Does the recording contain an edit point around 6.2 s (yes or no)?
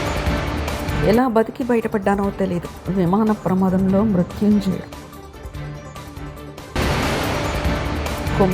no